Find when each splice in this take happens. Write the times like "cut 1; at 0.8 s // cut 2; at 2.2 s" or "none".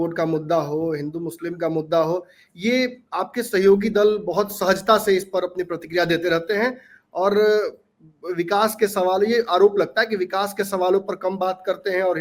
none